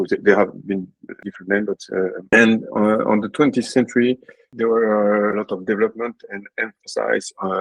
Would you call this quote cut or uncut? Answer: cut